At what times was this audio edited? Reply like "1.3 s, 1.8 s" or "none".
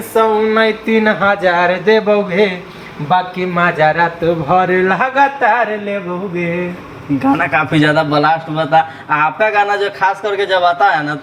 none